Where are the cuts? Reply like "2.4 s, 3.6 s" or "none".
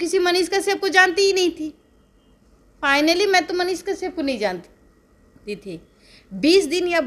none

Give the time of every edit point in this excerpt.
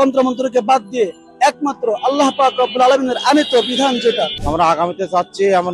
4.4 s

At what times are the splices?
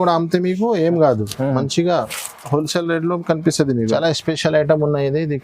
3.9 s

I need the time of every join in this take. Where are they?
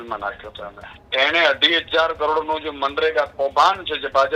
1.1 s

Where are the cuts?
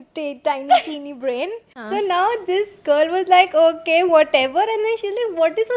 1.8 s

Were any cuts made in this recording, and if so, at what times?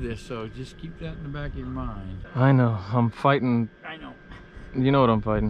2.2 s

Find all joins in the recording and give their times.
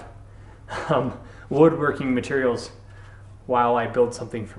none

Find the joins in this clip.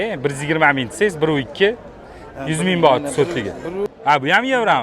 3.8 s

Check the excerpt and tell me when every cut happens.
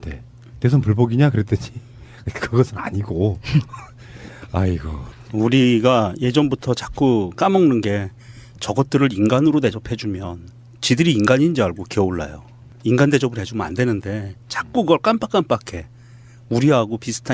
6.1 s

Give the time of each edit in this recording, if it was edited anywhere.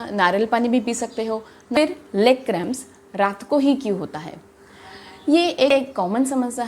1.8 s

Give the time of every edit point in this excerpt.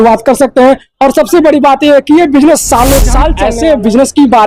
3.4 s

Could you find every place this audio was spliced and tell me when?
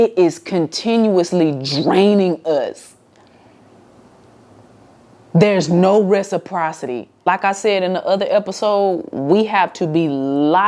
none

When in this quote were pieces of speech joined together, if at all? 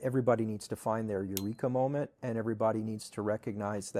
none

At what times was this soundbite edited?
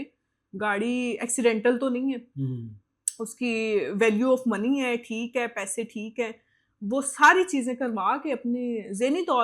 none

